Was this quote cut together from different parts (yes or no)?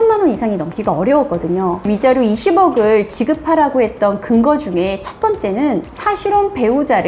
yes